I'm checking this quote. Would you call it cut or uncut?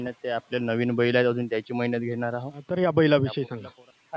cut